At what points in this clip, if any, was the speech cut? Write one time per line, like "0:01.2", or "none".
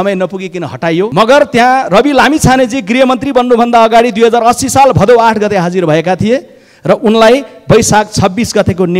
0:01.1